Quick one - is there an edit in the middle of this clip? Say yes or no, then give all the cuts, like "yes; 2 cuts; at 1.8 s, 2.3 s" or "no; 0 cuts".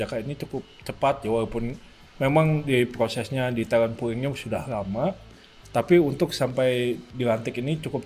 no; 0 cuts